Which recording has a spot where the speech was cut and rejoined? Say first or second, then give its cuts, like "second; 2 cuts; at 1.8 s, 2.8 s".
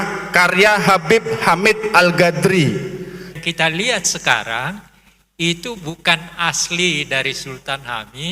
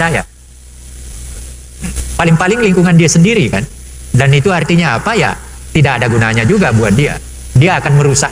first; 1 cut; at 3.3 s